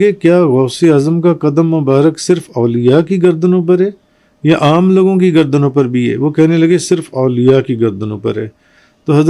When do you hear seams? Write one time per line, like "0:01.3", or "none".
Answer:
none